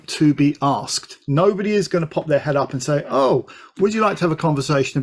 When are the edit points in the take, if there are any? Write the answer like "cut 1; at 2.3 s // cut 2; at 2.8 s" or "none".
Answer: none